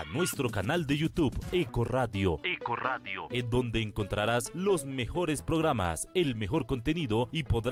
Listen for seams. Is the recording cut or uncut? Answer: uncut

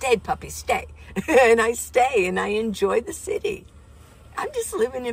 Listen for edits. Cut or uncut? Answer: uncut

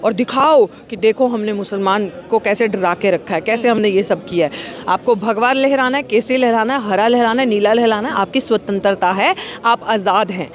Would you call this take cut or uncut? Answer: cut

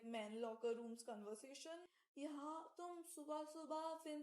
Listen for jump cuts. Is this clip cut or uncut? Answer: cut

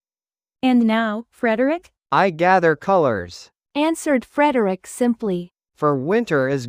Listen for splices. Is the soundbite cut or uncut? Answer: cut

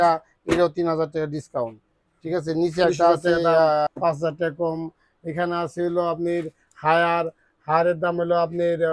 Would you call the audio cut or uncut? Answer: cut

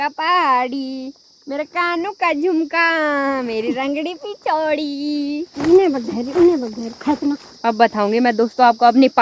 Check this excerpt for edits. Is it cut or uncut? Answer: uncut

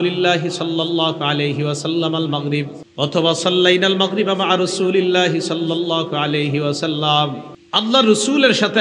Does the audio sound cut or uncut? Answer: cut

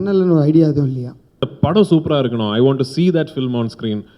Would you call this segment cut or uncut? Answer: cut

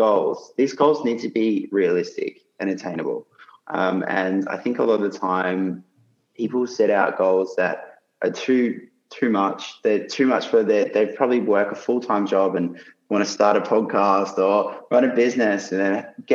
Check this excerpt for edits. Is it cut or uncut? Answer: uncut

